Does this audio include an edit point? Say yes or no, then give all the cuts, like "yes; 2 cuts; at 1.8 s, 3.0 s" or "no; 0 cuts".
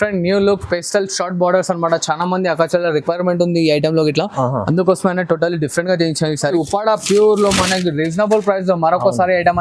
yes; 1 cut; at 6.6 s